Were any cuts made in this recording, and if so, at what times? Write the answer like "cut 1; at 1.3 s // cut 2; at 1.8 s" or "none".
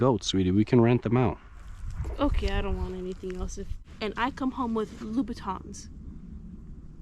cut 1; at 3.8 s